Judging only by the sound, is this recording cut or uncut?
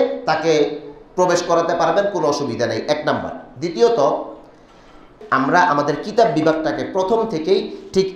cut